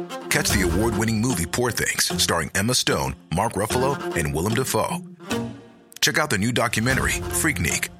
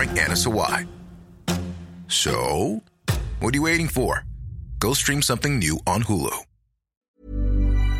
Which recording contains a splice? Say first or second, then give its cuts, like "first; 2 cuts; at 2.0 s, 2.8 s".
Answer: second; 1 cut; at 6.9 s